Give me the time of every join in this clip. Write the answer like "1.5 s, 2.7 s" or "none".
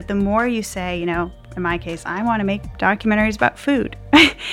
2.7 s